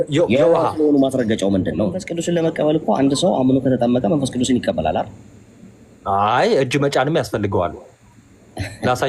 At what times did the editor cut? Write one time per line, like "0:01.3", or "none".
0:02.1